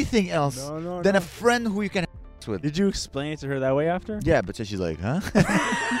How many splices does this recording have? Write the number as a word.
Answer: one